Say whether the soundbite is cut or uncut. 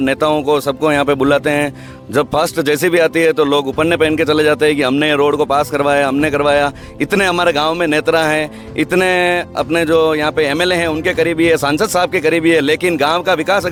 uncut